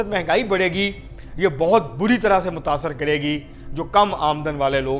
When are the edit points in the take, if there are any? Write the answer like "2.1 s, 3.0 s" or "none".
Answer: none